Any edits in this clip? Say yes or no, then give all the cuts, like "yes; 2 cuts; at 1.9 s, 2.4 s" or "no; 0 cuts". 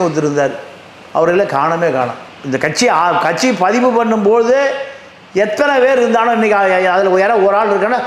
no; 0 cuts